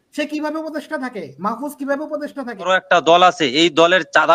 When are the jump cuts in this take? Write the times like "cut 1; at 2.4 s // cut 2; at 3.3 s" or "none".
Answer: cut 1; at 2.7 s